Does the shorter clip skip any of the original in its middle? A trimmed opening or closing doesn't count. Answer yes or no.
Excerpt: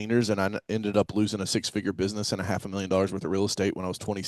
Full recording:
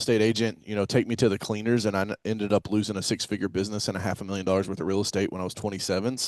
no